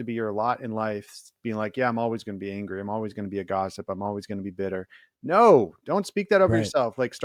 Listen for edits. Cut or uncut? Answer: uncut